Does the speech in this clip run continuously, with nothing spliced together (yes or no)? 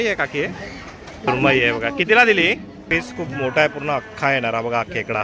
no